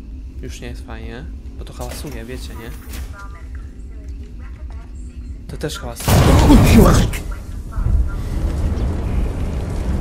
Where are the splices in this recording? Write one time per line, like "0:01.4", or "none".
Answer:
none